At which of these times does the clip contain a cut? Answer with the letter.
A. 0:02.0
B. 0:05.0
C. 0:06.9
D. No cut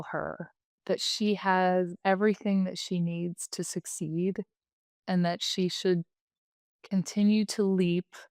A